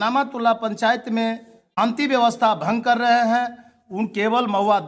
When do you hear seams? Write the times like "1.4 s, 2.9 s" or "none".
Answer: 1.6 s